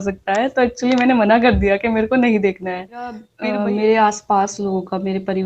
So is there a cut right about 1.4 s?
no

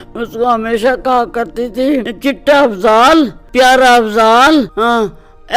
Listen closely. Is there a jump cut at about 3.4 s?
yes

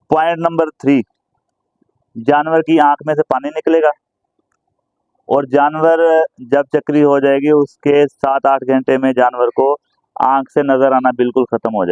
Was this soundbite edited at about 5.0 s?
no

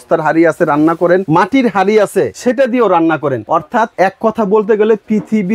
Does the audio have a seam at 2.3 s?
yes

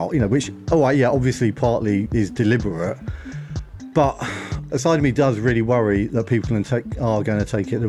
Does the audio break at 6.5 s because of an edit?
no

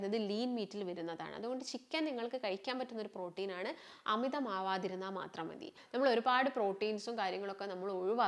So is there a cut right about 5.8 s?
yes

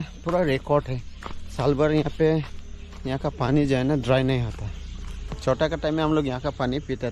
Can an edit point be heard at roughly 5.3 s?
yes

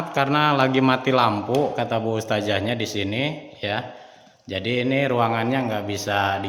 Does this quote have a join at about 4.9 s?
no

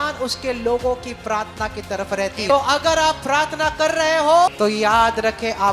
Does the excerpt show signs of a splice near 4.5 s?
yes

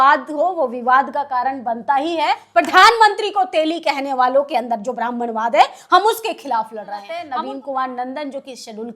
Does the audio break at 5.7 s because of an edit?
no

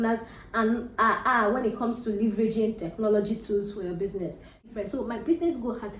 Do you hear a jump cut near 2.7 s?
no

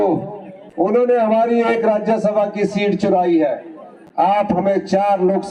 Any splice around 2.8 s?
no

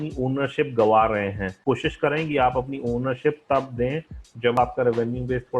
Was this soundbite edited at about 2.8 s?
no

